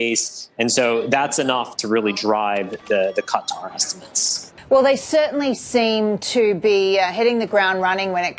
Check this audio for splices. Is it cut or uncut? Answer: cut